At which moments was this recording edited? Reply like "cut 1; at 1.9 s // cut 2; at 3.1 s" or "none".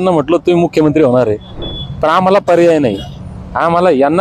cut 1; at 1.6 s